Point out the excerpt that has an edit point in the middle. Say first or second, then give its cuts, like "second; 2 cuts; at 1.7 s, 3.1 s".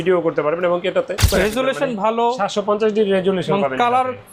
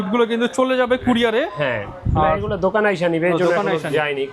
first; 1 cut; at 1.2 s